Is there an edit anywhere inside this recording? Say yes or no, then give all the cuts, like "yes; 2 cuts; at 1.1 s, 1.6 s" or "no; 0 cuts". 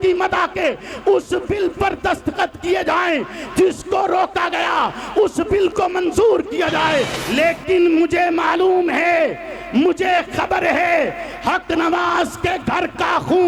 yes; 1 cut; at 7.2 s